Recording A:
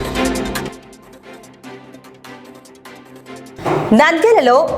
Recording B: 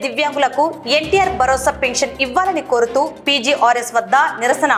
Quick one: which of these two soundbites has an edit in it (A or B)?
A